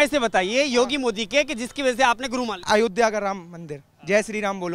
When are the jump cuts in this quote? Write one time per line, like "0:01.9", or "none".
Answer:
0:02.6